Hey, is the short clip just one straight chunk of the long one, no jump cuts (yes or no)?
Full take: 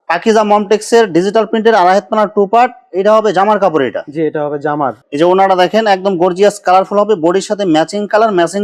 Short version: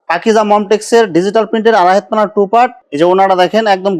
no